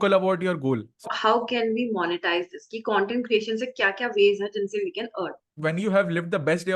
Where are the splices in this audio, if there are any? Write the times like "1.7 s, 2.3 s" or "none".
1.0 s, 5.5 s